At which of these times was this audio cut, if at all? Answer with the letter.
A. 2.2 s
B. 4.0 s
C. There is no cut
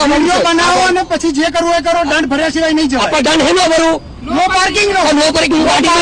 C